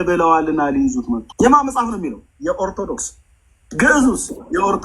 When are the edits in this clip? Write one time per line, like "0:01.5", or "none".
0:01.3